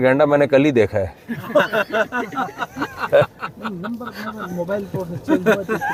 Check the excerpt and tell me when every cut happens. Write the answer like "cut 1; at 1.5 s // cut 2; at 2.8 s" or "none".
none